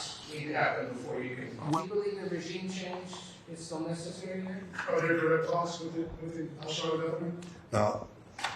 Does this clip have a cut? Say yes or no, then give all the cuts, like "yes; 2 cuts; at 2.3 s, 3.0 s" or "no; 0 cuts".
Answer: yes; 2 cuts; at 1.6 s, 4.7 s